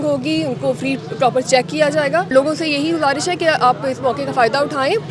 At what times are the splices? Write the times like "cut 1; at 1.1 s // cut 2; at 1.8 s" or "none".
cut 1; at 2.3 s